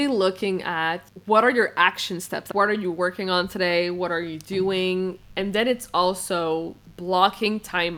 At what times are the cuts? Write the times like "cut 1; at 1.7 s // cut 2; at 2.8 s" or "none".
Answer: cut 1; at 1.1 s // cut 2; at 2.5 s